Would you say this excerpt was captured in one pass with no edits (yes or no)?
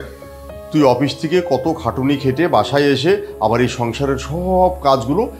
yes